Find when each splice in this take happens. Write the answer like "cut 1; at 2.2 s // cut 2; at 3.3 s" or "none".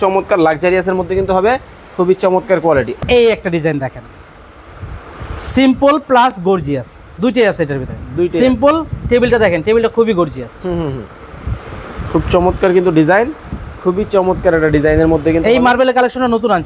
cut 1; at 2.9 s